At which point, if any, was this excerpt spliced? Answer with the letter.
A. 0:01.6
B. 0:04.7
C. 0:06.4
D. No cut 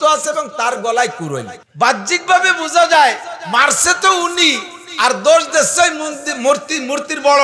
A